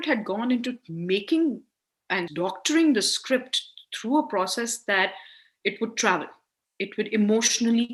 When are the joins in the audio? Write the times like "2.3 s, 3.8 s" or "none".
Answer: none